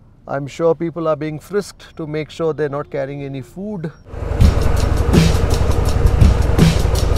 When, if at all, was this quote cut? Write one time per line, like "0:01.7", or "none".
0:04.3